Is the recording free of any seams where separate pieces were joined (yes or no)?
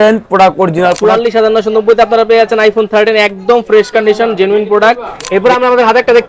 no